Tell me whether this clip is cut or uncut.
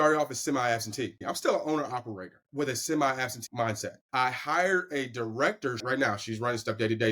cut